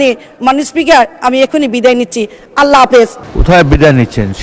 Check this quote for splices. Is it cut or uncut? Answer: cut